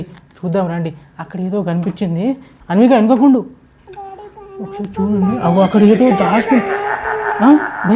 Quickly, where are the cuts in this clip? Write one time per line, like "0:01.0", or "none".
none